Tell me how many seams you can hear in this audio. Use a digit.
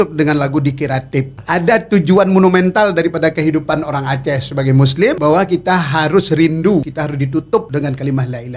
3